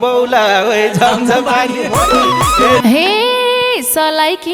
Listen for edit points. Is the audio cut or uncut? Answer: cut